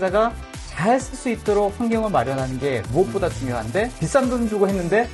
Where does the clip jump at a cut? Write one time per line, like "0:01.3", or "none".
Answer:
0:03.9

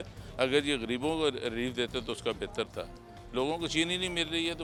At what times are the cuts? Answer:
none

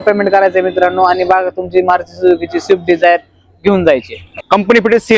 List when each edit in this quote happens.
0:04.3

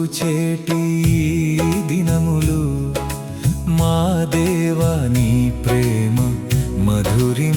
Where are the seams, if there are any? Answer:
none

